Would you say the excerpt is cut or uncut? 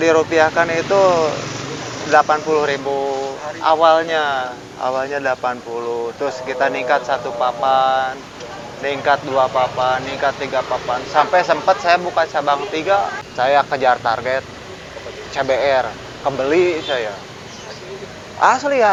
uncut